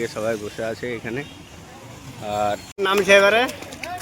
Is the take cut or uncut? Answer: cut